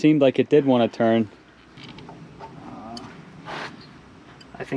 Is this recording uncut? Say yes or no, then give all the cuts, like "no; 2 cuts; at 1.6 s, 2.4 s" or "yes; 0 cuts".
no; 1 cut; at 1.8 s